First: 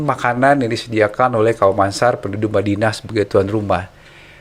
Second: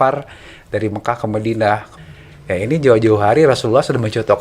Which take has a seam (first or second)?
second